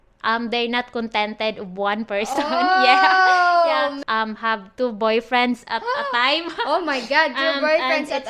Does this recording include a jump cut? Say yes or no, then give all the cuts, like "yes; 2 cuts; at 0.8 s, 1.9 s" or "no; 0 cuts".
yes; 1 cut; at 4.0 s